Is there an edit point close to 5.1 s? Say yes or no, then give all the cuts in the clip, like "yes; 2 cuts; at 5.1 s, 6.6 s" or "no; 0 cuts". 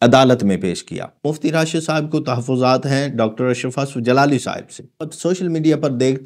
yes; 2 cuts; at 1.3 s, 5.1 s